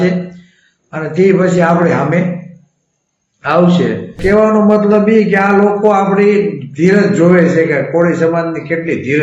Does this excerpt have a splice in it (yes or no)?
yes